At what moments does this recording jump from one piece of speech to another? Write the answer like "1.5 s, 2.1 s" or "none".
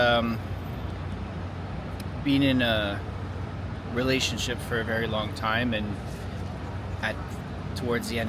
none

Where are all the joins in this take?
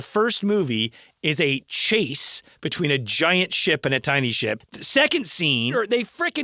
4.7 s, 5.7 s

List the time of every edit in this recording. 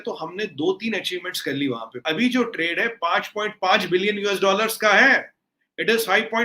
1.9 s

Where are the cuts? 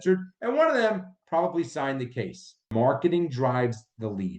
2.7 s

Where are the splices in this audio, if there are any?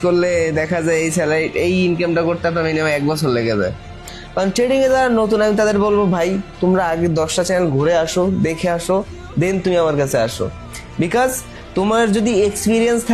4.2 s, 9.0 s

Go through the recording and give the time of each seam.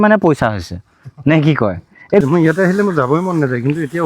2.2 s

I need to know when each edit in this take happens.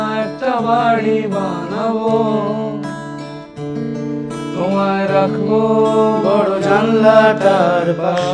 none

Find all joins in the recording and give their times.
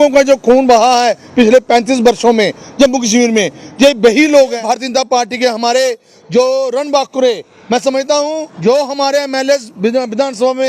4.6 s, 8.5 s

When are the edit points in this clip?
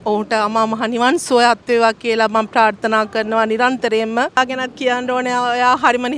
4.4 s

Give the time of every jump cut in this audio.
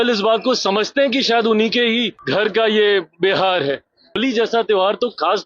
2.2 s, 4.2 s

